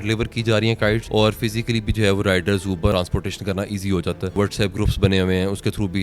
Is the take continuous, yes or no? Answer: no